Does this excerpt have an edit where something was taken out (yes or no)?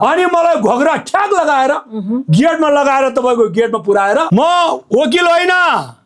yes